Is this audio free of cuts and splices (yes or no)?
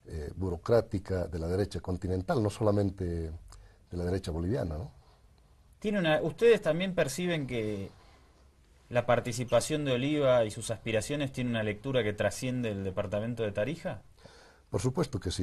no